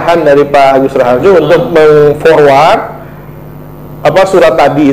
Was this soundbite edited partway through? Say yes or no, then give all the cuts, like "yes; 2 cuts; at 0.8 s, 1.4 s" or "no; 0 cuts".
no; 0 cuts